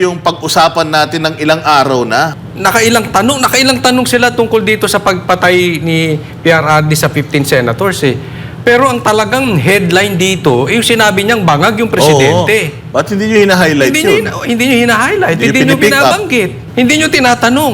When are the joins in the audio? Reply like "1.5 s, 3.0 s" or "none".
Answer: 2.4 s, 16.6 s